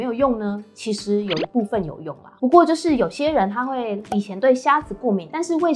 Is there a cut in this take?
yes; 1 cut; at 2.2 s

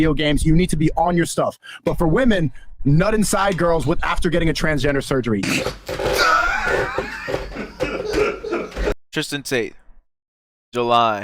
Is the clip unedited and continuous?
no; 1 cut; at 9.0 s

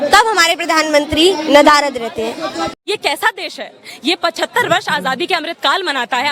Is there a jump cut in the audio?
yes; 1 cut; at 2.8 s

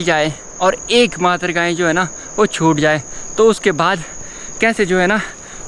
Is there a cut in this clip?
no; 0 cuts

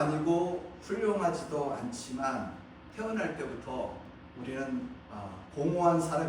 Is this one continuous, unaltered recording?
no; 2 cuts; at 2.8 s, 4.2 s

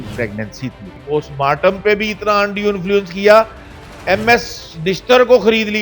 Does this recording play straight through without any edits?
no; 1 cut; at 1.0 s

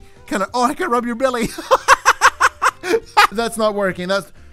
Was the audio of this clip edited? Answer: yes; 1 cut; at 3.3 s

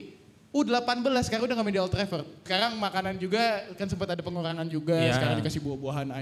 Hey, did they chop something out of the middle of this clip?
yes; 1 cut; at 2.4 s

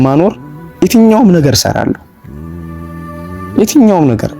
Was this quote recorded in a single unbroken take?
no; 2 cuts; at 2.0 s, 3.5 s

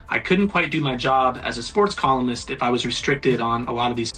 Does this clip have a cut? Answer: no; 0 cuts

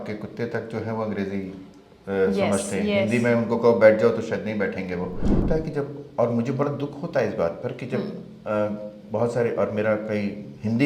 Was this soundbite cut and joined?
yes; 1 cut; at 5.4 s

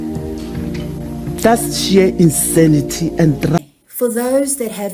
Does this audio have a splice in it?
yes; 1 cut; at 3.6 s

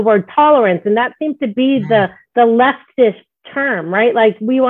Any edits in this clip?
no; 0 cuts

